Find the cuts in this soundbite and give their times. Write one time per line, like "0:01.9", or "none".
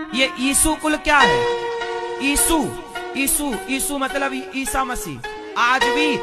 none